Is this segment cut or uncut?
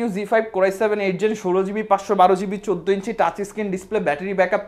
uncut